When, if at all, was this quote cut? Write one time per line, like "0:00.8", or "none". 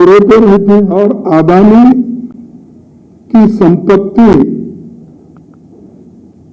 0:00.9